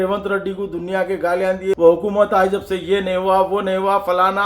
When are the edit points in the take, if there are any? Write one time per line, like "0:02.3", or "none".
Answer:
0:01.8